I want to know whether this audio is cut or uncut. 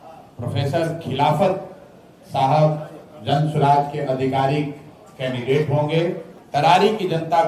cut